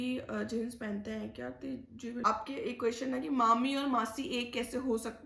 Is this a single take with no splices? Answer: no; 1 cut; at 2.2 s

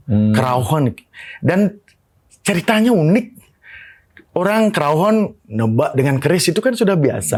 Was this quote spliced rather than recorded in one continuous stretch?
no; 0 cuts

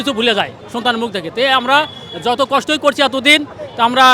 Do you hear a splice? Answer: no; 0 cuts

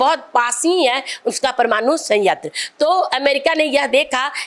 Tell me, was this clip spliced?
no; 0 cuts

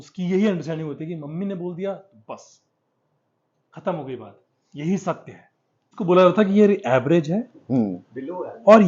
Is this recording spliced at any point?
yes; 1 cut; at 6.0 s

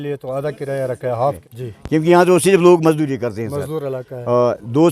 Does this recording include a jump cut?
yes; 1 cut; at 1.4 s

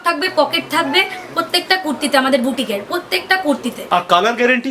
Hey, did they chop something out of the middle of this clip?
no; 0 cuts

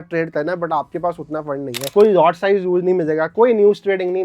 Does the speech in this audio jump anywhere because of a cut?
yes; 1 cut; at 1.9 s

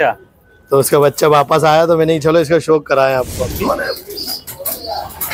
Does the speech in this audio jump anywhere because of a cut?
yes; 1 cut; at 3.5 s

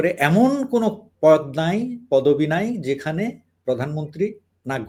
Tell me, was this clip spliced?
no; 0 cuts

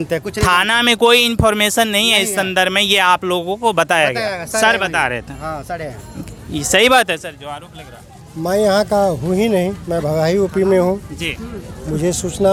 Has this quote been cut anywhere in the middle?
no; 0 cuts

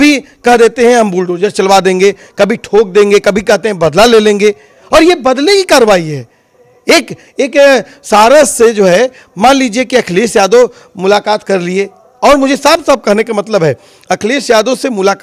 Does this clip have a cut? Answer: no; 0 cuts

